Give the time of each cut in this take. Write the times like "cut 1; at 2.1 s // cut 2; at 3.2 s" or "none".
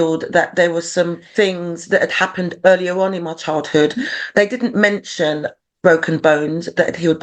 cut 1; at 1.2 s